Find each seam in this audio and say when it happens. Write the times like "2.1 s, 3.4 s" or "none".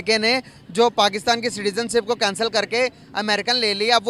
none